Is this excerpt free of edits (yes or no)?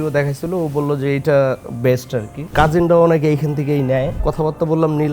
no